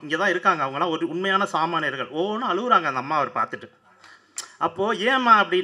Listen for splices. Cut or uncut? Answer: uncut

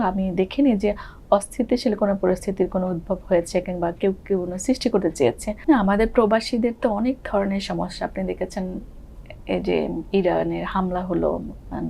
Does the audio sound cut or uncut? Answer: cut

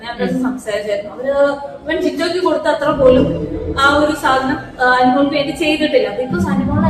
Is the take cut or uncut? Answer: uncut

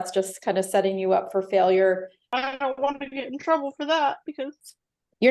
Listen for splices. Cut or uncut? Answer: cut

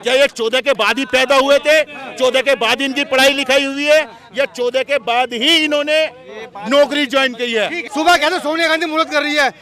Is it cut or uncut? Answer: cut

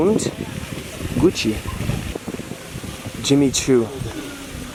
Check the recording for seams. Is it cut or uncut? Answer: uncut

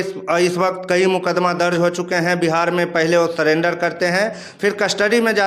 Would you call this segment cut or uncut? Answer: uncut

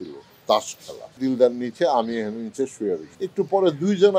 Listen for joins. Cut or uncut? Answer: cut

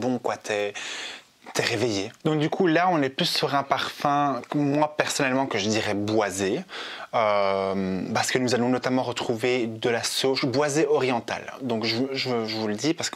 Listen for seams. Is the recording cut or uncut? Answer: uncut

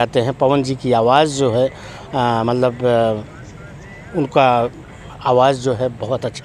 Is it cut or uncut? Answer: uncut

